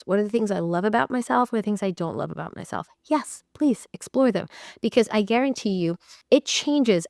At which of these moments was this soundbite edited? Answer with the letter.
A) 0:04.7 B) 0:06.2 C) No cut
B